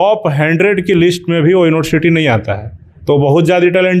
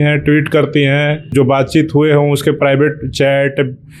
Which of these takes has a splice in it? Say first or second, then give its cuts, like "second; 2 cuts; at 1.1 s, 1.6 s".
second; 1 cut; at 1.3 s